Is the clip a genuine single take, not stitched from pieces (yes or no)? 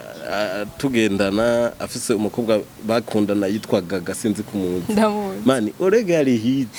yes